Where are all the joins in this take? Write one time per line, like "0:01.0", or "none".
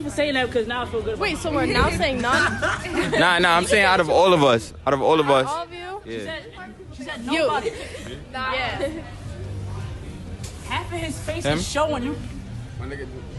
none